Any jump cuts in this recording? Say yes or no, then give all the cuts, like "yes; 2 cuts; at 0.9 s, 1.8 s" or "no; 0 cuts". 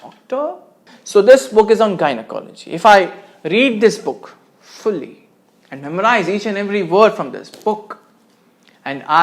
yes; 1 cut; at 0.9 s